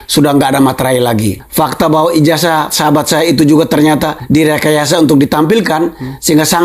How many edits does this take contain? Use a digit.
2